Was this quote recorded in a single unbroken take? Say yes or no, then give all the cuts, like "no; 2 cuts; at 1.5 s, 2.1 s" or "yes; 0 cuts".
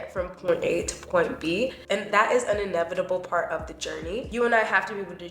no; 1 cut; at 4.3 s